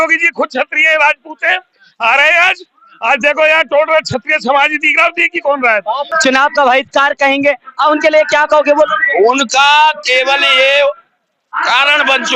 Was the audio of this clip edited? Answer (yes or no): yes